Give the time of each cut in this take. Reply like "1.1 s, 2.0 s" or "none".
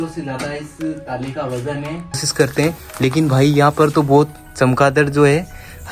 2.3 s